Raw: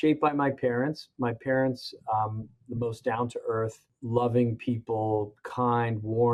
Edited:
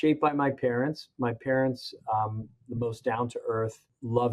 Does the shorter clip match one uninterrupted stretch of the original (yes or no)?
yes